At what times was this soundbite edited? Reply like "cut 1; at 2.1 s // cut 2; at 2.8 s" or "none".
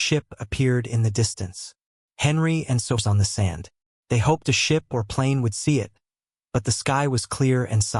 cut 1; at 3.0 s